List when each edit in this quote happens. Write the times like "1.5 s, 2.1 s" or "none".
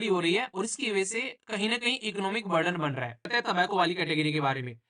3.3 s